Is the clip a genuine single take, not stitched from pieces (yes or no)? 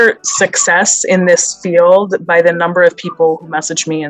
yes